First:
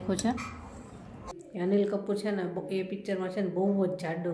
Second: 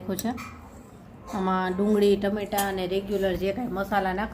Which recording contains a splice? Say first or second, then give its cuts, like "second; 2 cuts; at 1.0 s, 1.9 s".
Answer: first; 1 cut; at 1.2 s